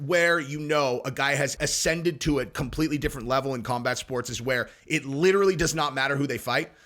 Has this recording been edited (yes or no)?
yes